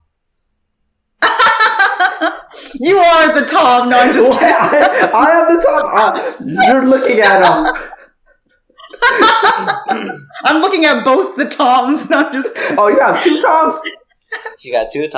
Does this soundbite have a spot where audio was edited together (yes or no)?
no